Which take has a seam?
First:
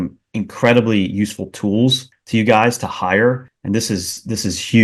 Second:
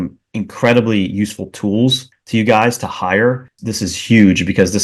second; 1 cut; at 3.5 s

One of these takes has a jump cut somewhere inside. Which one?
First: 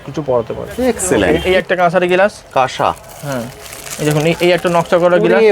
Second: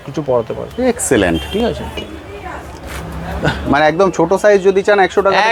first; 1 cut; at 1.4 s

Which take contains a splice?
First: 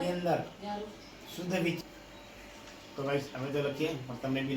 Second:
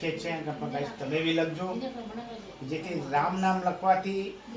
first; 1 cut; at 1.8 s

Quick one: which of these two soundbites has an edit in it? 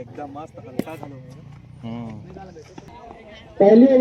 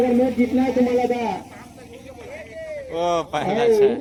first; 1 cut; at 2.9 s

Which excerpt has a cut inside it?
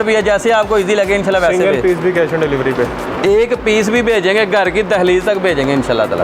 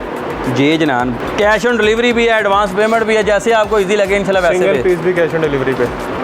second; 1 cut; at 1.2 s

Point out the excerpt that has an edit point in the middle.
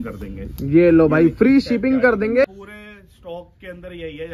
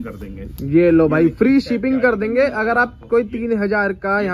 first; 1 cut; at 2.4 s

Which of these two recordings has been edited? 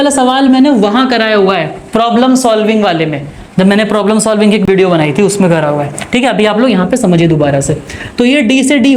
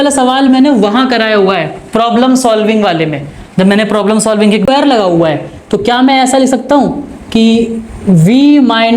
second; 1 cut; at 4.7 s

